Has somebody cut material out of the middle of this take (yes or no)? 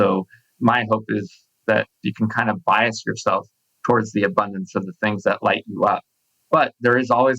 yes